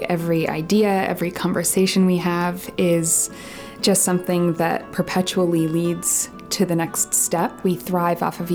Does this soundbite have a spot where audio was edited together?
yes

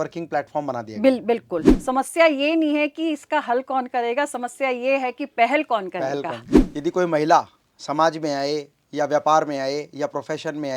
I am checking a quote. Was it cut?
yes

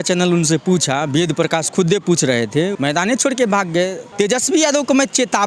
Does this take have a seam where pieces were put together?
yes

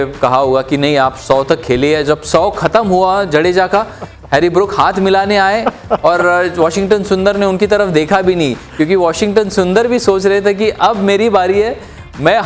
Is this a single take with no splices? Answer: yes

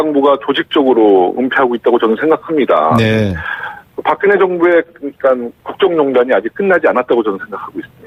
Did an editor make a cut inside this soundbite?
no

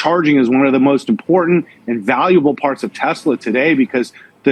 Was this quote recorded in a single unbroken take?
yes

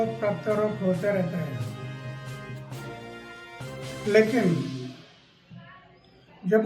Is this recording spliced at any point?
yes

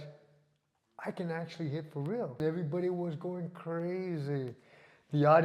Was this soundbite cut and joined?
yes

